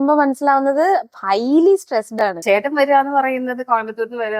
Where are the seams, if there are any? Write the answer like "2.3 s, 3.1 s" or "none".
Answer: 2.4 s

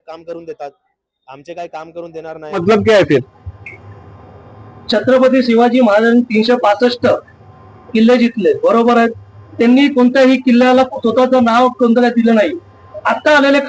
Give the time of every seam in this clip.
2.6 s

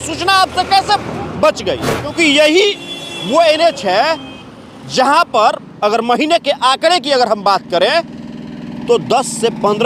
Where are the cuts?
2.1 s

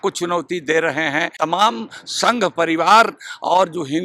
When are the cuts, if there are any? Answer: 1.3 s

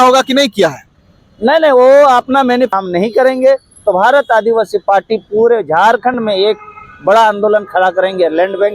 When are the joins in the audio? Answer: 2.7 s

